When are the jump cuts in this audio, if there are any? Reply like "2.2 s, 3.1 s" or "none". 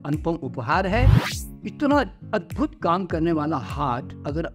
1.2 s